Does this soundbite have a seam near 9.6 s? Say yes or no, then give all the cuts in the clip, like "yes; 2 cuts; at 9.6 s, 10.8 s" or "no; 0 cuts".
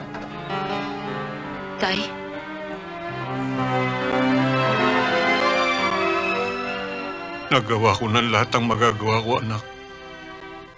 no; 1 cut; at 5.0 s